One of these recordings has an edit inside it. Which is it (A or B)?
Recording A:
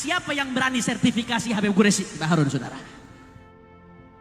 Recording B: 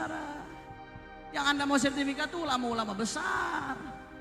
A